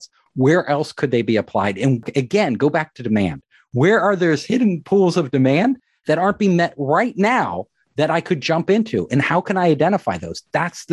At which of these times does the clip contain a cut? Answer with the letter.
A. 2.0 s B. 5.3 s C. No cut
A